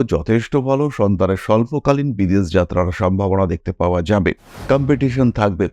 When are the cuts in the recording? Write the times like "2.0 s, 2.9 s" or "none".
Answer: 4.5 s